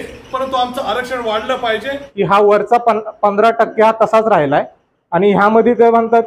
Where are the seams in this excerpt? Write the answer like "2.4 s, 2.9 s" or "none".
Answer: 2.1 s